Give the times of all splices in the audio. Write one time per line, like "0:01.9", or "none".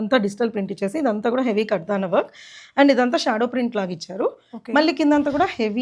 none